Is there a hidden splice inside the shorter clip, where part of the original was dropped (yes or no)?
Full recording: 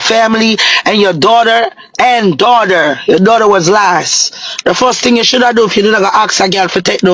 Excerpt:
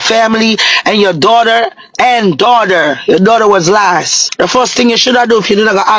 yes